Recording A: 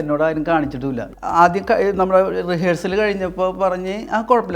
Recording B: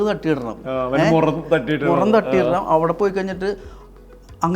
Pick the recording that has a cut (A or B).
A